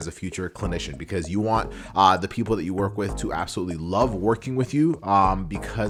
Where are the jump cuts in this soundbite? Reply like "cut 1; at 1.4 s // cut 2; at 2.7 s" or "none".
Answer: none